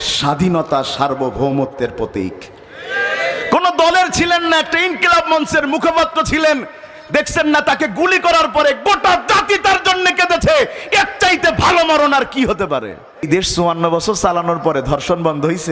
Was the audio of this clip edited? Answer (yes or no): yes